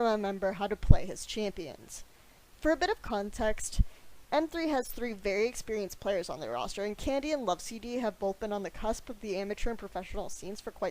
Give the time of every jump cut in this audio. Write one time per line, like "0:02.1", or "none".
0:09.6